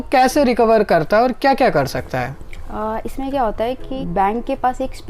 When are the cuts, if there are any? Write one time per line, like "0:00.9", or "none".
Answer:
0:04.0